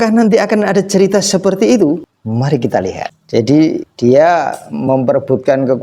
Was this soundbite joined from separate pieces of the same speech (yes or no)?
yes